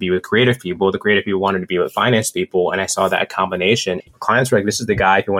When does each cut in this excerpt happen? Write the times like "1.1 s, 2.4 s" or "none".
4.0 s